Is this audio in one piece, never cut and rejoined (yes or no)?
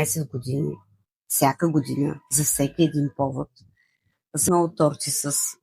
no